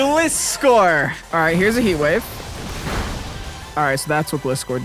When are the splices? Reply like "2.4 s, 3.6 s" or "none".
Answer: 1.2 s